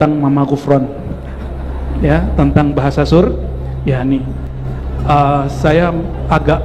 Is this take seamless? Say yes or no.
yes